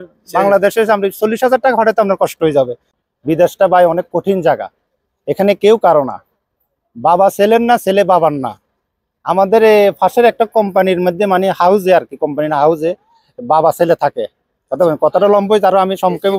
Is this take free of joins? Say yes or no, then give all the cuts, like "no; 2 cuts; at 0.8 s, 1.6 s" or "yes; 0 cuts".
no; 1 cut; at 3.0 s